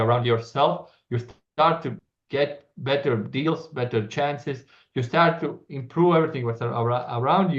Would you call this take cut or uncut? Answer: uncut